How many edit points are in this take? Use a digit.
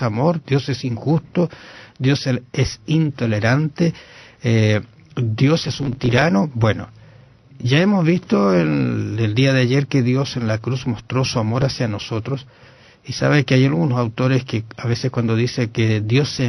1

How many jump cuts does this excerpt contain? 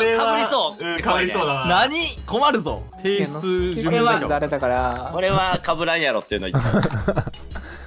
1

